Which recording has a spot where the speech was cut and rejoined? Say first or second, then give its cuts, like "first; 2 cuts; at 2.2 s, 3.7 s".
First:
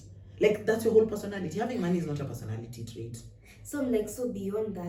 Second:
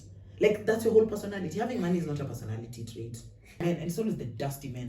second; 1 cut; at 3.6 s